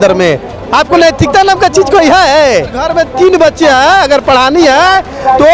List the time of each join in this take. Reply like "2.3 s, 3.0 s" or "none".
2.8 s

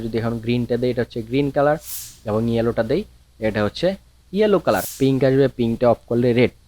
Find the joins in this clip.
4.9 s

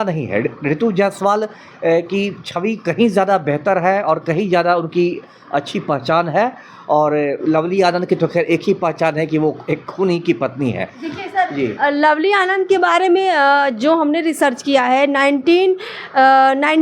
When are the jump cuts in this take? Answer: none

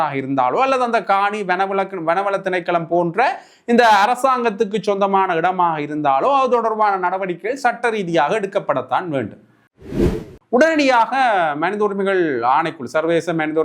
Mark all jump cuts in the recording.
10.1 s

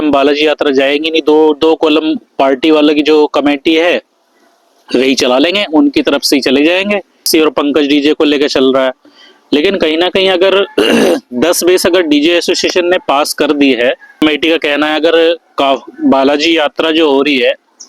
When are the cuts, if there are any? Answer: 7.3 s, 14.2 s

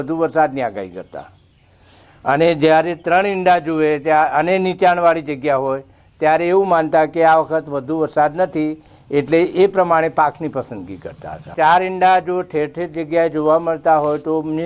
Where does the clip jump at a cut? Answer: 12.1 s

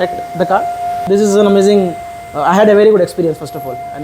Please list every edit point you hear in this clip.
1.0 s

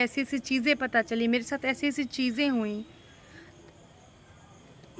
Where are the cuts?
none

